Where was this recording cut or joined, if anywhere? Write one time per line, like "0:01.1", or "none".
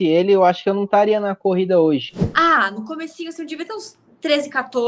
0:02.1